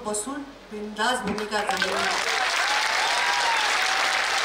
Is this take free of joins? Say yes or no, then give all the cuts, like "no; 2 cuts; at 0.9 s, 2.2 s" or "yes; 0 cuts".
yes; 0 cuts